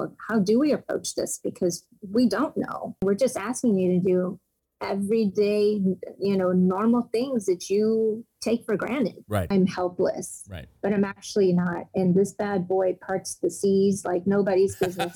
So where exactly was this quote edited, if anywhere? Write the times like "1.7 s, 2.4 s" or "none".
3.0 s, 9.5 s